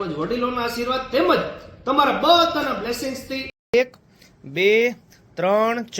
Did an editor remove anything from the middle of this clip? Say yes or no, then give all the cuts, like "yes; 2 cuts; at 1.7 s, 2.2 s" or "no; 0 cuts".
yes; 1 cut; at 3.7 s